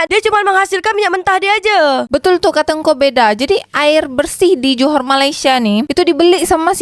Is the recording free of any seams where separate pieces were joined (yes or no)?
yes